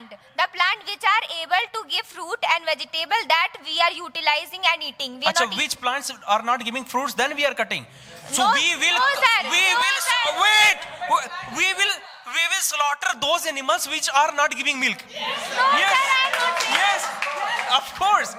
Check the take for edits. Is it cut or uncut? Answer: uncut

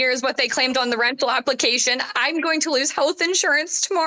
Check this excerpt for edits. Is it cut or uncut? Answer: uncut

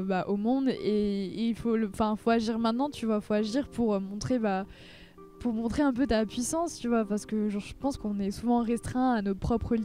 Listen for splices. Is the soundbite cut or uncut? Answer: cut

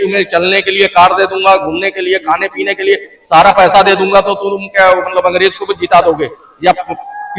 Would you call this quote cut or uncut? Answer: uncut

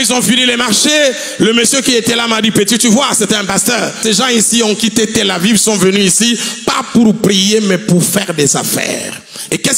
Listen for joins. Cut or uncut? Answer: cut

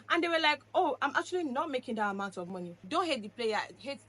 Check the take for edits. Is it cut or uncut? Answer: cut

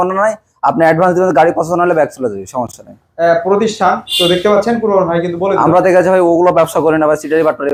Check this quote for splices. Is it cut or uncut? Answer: uncut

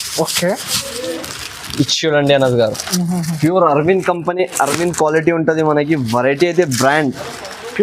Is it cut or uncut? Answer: uncut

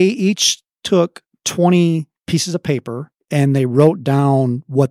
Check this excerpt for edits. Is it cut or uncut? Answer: uncut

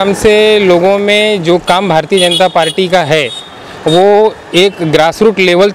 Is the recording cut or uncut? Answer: uncut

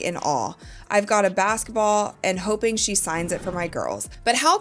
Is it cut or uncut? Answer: uncut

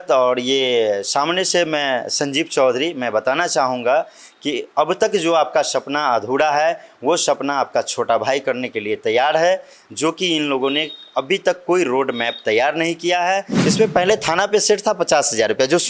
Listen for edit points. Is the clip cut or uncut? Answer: cut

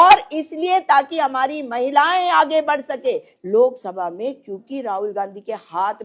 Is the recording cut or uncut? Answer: cut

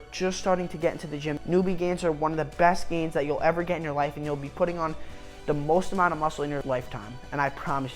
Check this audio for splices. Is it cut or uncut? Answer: cut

